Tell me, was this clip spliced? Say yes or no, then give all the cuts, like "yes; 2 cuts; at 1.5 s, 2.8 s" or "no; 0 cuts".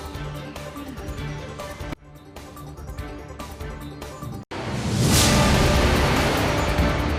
no; 0 cuts